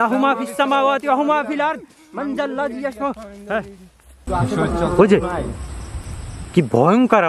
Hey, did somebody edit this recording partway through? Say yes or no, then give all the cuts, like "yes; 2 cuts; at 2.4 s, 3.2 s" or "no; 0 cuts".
yes; 1 cut; at 4.1 s